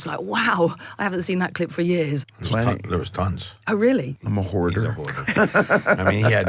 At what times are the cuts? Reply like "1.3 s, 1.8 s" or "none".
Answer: 2.2 s, 4.2 s